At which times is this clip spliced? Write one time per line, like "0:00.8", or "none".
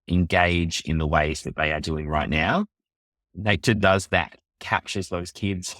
0:03.3
0:04.6